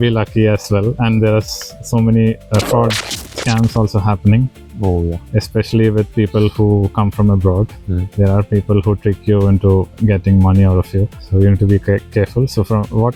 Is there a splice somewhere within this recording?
no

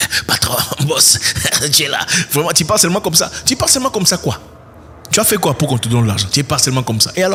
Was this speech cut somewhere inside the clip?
no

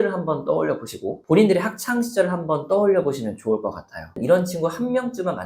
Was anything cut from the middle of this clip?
yes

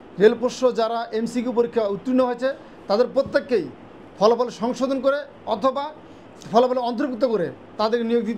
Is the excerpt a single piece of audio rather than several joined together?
yes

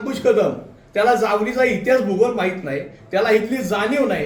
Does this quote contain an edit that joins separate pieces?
no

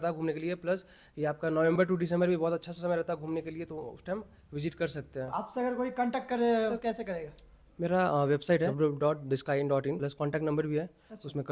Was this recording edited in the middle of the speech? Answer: yes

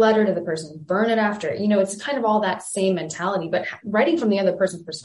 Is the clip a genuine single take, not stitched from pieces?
yes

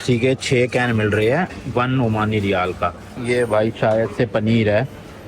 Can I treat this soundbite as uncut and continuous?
no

